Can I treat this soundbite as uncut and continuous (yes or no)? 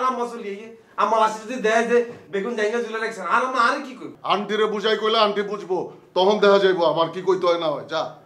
no